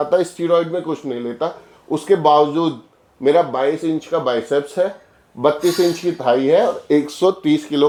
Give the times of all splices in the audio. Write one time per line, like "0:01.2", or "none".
none